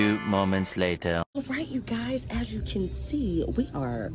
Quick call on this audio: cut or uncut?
uncut